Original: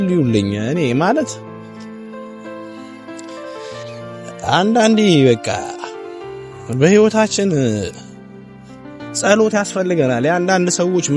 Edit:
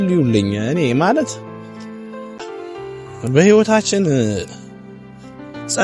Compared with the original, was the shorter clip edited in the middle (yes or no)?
yes